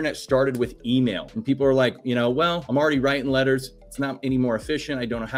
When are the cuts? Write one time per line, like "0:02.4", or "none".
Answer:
0:01.3
0:02.6